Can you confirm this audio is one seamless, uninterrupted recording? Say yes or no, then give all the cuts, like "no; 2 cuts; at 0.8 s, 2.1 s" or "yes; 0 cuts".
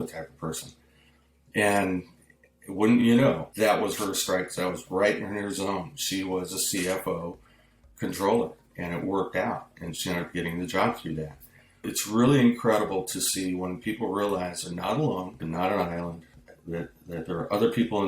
no; 2 cuts; at 11.9 s, 15.4 s